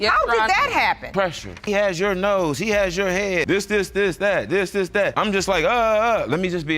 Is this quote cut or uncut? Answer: cut